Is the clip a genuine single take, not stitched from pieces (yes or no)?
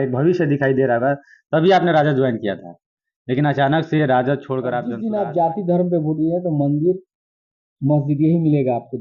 no